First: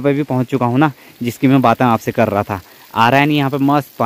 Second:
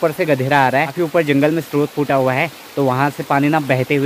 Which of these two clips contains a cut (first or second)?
second